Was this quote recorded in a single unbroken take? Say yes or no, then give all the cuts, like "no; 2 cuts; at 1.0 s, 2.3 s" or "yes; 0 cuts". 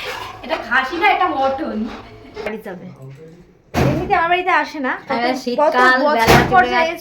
no; 1 cut; at 2.5 s